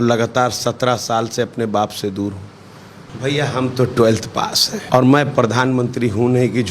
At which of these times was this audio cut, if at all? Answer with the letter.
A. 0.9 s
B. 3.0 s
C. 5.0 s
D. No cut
B